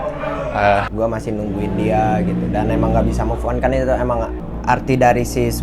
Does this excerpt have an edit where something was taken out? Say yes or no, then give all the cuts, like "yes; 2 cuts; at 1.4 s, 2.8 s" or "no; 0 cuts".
yes; 2 cuts; at 0.9 s, 4.4 s